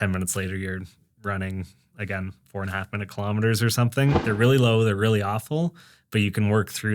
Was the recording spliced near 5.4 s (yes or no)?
no